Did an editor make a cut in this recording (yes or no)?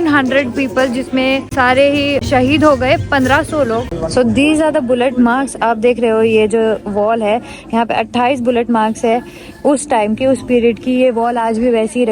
yes